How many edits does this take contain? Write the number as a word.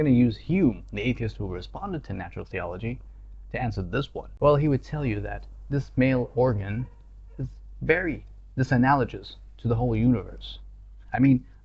one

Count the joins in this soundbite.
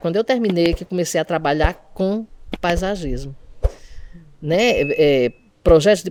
zero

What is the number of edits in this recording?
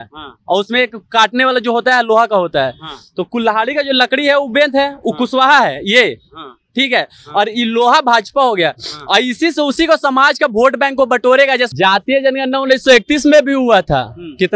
one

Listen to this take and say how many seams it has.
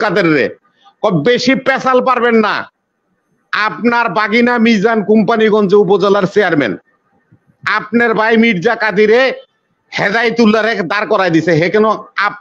zero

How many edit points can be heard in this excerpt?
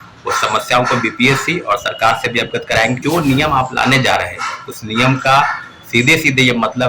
one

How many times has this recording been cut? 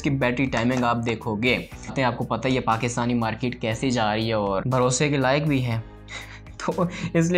one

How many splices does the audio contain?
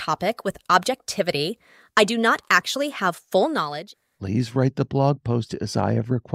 one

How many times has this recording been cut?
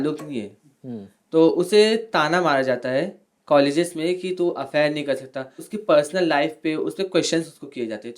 one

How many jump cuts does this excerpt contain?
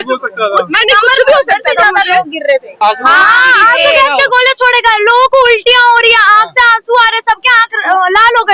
one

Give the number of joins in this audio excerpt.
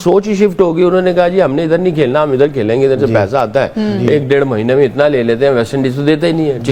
zero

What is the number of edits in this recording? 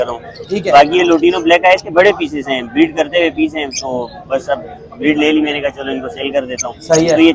zero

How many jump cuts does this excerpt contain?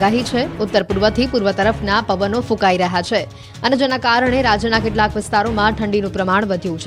zero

